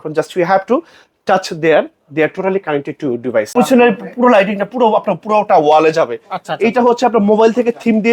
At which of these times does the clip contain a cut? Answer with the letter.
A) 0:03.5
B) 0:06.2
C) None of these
A